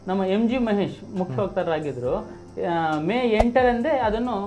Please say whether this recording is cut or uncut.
uncut